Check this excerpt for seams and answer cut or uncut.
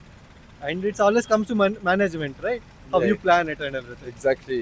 uncut